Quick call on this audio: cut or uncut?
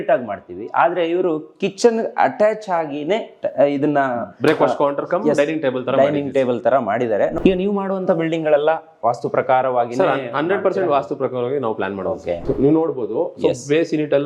cut